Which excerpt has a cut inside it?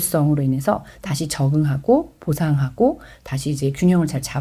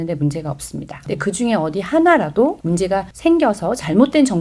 second; 2 cuts; at 1.0 s, 2.9 s

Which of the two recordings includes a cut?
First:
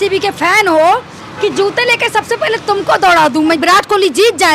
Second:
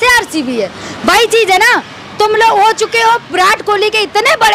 first; 1 cut; at 3.6 s

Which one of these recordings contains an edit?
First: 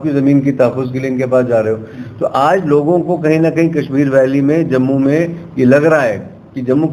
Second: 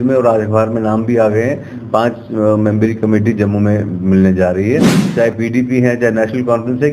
second; 1 cut; at 5.0 s

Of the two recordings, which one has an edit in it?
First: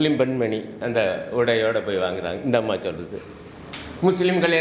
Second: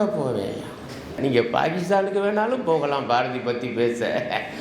second; 1 cut; at 1.2 s

